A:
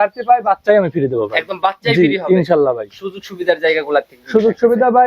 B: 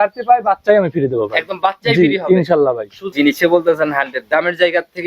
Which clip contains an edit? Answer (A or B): B